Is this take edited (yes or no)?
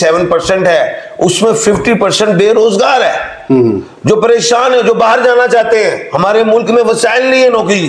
no